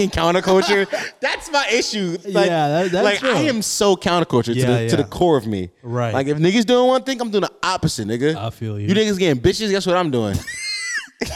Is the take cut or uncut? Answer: uncut